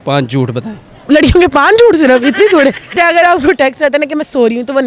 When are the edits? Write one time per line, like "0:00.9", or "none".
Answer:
0:03.0